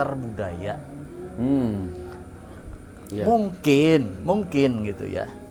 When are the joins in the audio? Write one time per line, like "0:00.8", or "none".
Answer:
none